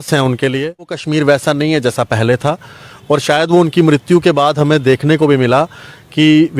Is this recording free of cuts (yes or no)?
no